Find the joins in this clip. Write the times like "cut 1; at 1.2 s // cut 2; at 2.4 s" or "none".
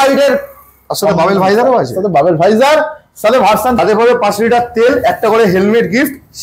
cut 1; at 3.8 s